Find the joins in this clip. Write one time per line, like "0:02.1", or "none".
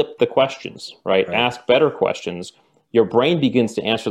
none